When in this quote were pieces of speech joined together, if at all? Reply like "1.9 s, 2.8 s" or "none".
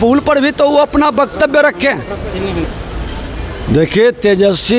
none